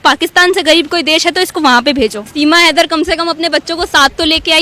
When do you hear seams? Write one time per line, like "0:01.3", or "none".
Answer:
0:02.2